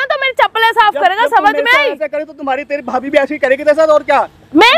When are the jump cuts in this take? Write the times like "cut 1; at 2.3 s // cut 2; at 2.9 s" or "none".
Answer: none